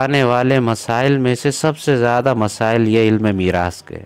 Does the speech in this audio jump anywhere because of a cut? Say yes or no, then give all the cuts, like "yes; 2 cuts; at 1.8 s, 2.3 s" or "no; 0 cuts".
no; 0 cuts